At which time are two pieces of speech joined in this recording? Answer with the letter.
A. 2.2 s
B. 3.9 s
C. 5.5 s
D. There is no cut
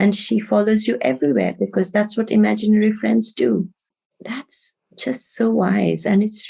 B